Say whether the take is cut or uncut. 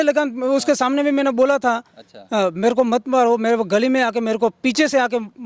uncut